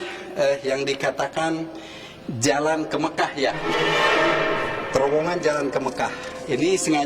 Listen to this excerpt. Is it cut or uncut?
uncut